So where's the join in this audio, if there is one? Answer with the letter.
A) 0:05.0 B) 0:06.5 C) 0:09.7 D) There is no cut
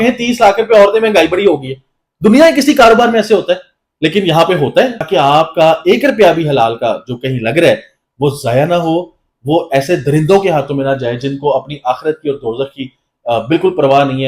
A